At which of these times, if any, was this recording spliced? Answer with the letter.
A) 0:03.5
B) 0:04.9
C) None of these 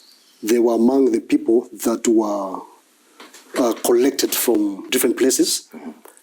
B